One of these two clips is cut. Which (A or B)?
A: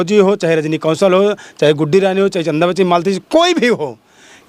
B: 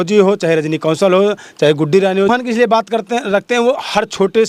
B